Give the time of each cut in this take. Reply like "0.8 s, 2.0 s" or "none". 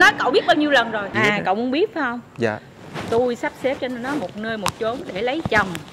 1.1 s